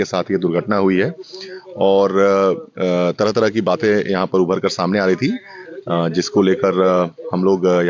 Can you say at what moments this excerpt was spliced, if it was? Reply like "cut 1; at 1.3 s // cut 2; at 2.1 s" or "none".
none